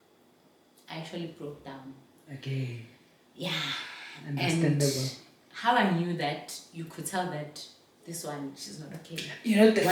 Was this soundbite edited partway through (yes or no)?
no